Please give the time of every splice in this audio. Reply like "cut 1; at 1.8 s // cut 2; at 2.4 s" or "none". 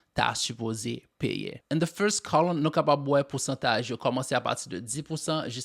cut 1; at 1.6 s